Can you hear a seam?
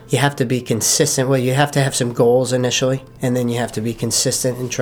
no; 0 cuts

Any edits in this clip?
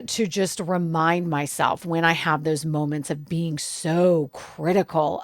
no; 0 cuts

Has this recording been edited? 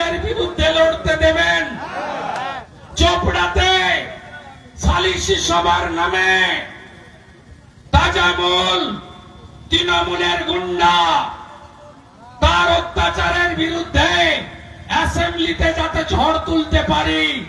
no; 0 cuts

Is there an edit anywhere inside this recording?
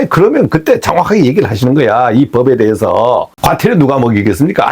yes; 1 cut; at 3.3 s

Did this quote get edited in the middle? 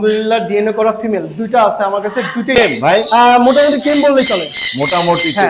yes; 1 cut; at 2.6 s

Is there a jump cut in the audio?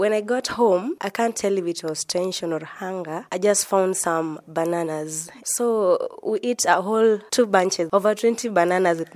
yes; 1 cut; at 5.4 s

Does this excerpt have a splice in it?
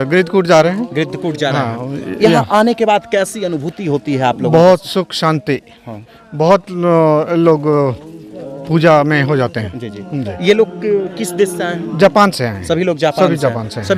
no; 0 cuts

